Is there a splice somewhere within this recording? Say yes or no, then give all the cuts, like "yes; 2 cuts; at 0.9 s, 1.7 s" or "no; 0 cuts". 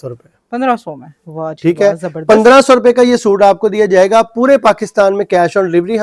no; 0 cuts